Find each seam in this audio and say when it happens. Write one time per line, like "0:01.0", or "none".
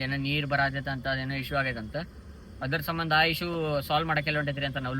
none

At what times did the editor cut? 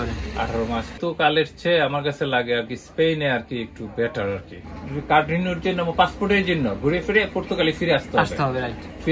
0:00.9
0:04.6

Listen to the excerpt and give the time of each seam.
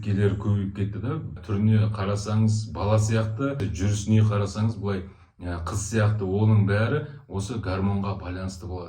0:01.4
0:03.6

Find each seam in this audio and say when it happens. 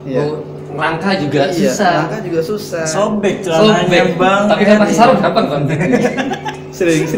none

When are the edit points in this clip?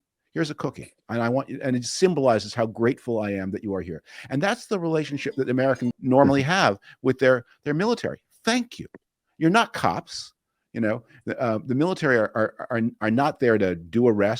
0:06.0

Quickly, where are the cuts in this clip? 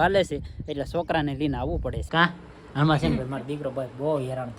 0:02.0

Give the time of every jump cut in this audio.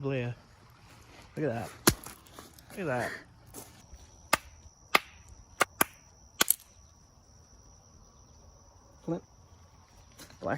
0:03.7

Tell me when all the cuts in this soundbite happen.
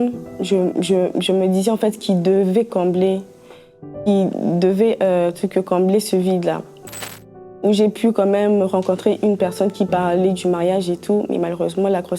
0:06.8

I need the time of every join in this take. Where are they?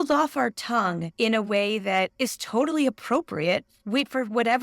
0:01.0
0:02.1
0:03.7

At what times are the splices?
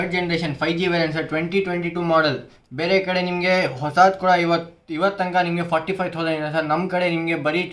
none

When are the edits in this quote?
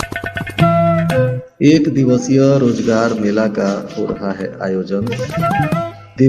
0:01.4

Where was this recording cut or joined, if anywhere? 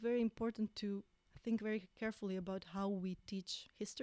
0:01.2

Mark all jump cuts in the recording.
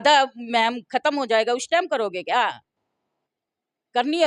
none

